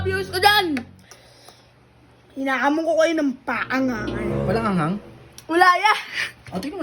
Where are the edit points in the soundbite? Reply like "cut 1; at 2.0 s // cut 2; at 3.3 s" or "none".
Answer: cut 1; at 4.3 s

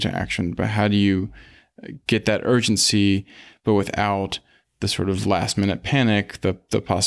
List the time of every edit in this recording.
none

